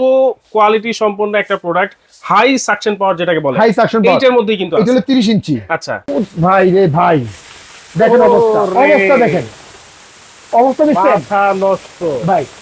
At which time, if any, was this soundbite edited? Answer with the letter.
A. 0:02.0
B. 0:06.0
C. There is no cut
B